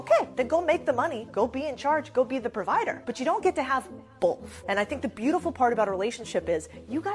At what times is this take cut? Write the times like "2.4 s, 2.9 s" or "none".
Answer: 3.4 s